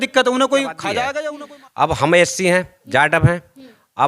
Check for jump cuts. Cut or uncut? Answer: cut